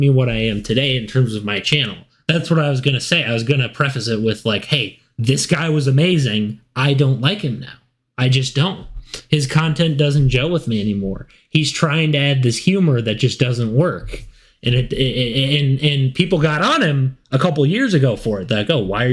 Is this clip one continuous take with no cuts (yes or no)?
yes